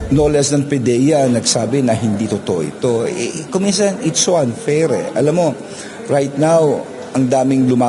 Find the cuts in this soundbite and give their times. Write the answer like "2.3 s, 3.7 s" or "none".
none